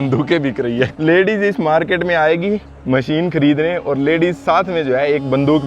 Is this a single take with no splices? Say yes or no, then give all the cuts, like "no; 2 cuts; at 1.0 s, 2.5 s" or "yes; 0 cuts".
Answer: no; 1 cut; at 0.9 s